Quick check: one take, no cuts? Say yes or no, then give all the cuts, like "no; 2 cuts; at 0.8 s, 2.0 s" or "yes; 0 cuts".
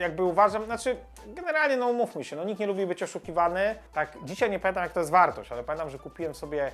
no; 1 cut; at 3.8 s